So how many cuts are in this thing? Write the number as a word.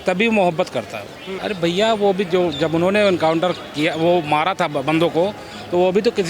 two